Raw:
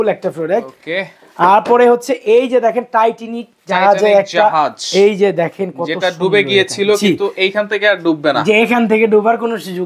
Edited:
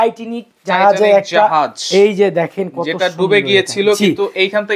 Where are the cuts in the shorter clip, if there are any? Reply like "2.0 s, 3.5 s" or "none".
none